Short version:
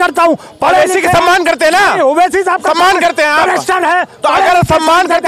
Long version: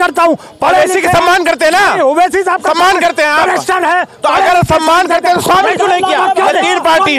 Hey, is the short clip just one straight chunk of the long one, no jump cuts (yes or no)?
yes